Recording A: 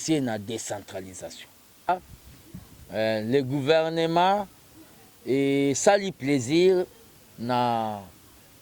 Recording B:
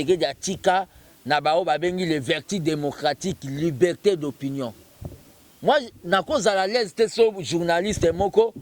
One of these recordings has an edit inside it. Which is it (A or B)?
A